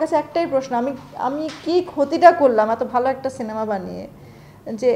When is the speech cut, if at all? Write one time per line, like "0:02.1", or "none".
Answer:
none

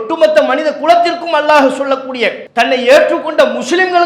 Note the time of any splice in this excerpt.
0:02.4

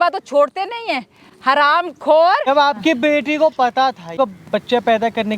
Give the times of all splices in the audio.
0:02.5
0:04.1

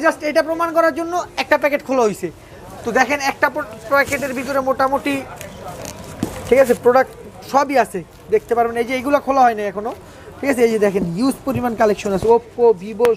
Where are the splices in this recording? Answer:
none

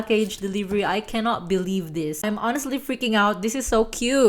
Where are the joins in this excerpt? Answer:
0:02.4

